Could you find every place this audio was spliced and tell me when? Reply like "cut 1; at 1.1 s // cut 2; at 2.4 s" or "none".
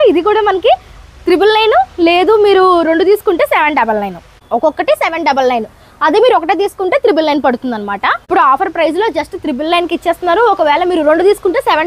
cut 1; at 4.3 s // cut 2; at 8.2 s